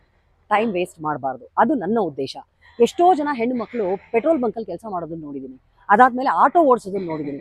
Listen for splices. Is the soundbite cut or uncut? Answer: uncut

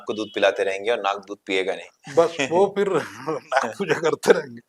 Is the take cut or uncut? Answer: uncut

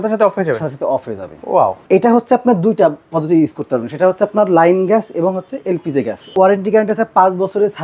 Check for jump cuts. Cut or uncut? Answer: cut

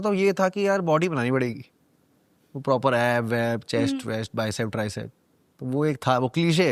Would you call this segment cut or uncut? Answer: uncut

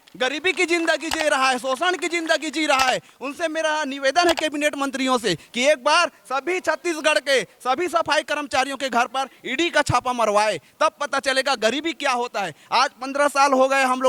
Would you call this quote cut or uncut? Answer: uncut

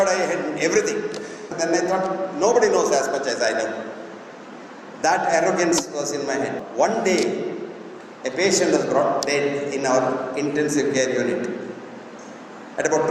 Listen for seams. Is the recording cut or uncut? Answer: cut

